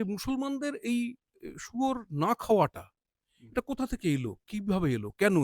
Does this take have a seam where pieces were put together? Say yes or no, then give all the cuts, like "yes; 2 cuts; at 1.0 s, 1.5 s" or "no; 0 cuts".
no; 0 cuts